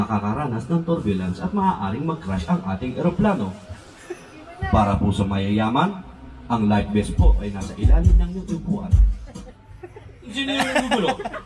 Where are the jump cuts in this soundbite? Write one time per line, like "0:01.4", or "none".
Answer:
0:10.3